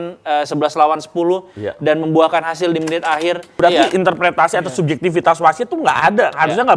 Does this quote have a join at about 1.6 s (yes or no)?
no